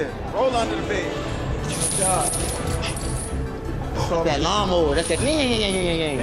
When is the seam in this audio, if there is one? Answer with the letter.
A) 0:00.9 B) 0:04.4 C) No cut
C